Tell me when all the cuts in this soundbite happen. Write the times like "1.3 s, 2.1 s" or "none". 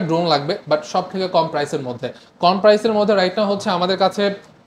none